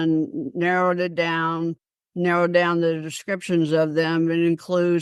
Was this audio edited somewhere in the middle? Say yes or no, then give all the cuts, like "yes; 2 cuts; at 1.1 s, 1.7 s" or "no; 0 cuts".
no; 0 cuts